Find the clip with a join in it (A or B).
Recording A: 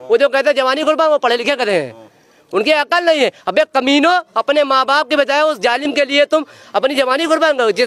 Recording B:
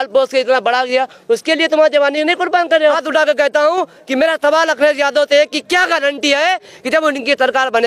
B